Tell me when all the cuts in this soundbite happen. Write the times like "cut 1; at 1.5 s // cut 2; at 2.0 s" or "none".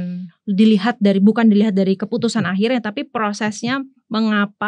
none